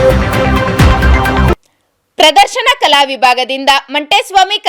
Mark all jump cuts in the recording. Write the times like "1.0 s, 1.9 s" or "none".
1.5 s